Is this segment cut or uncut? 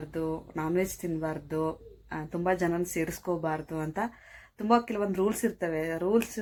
uncut